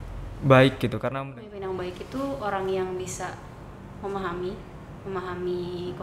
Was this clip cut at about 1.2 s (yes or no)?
yes